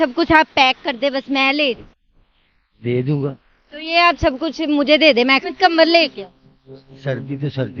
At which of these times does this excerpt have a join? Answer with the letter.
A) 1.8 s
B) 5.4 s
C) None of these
B